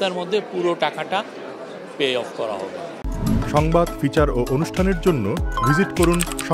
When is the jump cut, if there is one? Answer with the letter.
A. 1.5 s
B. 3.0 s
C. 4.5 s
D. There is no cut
D